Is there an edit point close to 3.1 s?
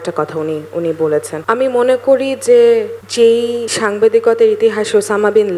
yes; 2 cuts; at 1.3 s, 3.1 s

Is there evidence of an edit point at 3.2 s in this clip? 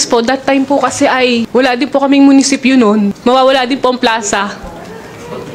yes; 2 cuts; at 1.5 s, 3.2 s

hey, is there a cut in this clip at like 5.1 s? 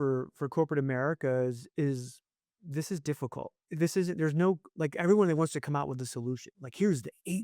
no; 2 cuts; at 2.6 s, 3.6 s

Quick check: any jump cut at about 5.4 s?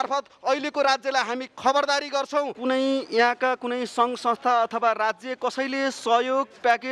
no; 1 cut; at 2.5 s

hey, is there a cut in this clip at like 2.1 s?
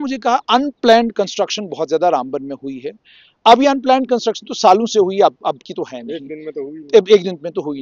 no; 0 cuts

